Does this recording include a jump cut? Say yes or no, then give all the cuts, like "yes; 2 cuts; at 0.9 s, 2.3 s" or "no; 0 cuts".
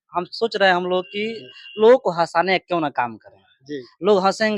no; 0 cuts